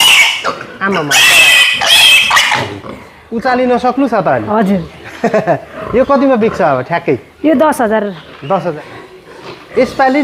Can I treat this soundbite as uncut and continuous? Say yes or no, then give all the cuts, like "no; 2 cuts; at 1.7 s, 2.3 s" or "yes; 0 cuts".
no; 1 cut; at 8.7 s